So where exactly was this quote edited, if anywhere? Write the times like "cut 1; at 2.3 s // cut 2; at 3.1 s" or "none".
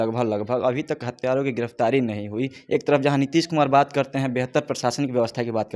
none